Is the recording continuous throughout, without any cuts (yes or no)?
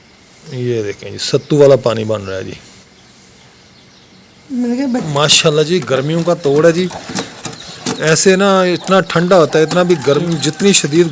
no